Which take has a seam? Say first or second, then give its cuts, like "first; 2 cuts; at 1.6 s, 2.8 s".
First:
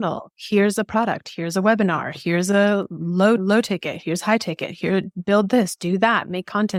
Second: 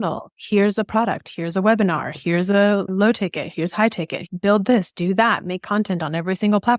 second; 2 cuts; at 2.9 s, 4.3 s